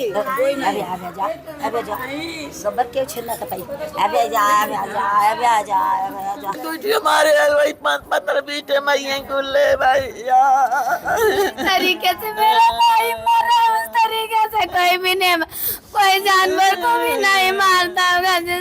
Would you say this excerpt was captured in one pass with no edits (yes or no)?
no